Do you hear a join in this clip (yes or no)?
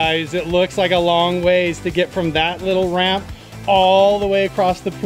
no